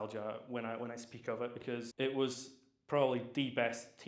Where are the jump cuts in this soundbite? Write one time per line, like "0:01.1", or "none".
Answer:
0:01.9